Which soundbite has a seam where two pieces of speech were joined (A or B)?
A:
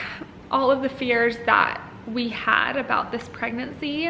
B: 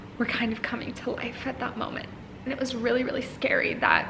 B